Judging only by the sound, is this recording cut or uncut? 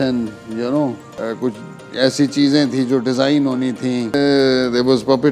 cut